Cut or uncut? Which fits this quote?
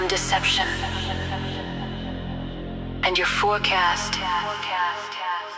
uncut